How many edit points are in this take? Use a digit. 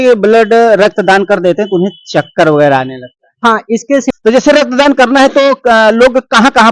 1